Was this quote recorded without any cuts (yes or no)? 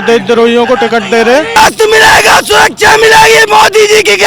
no